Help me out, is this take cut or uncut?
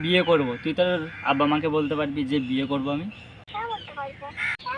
uncut